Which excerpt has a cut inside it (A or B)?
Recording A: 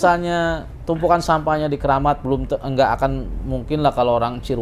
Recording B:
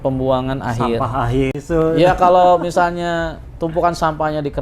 B